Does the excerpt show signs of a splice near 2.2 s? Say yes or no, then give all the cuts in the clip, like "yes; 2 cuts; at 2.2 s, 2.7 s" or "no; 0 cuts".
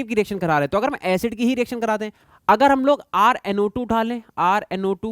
yes; 1 cut; at 2.2 s